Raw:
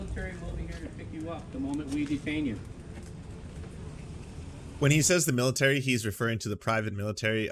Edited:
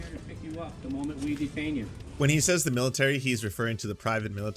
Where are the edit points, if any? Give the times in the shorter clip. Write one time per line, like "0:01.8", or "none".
0:02.0